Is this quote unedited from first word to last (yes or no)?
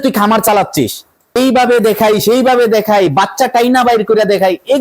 no